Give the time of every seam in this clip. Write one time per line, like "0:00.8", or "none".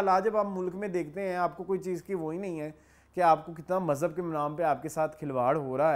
none